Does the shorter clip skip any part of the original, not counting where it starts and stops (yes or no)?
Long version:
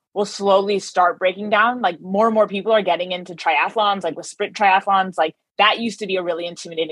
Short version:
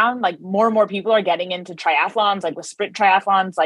no